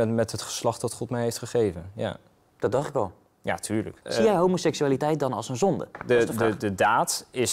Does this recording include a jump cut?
yes; 1 cut; at 4.0 s

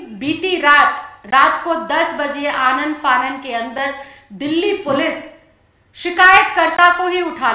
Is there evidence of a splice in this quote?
no; 0 cuts

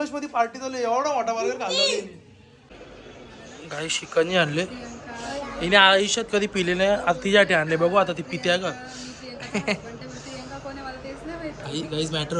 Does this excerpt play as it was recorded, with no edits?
no; 1 cut; at 2.6 s

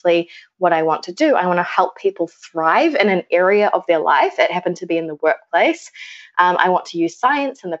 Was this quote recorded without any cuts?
yes; 0 cuts

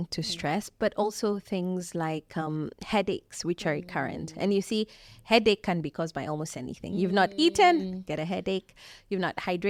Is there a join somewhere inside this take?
no; 0 cuts

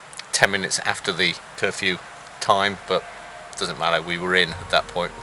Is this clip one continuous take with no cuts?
no; 1 cut; at 1.4 s

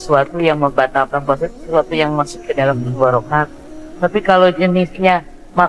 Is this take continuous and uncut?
yes; 0 cuts

